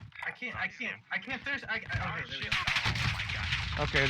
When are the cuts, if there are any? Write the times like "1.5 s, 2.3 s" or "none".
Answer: 1.2 s